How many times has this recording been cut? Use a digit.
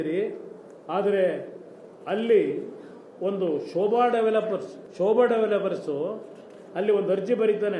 1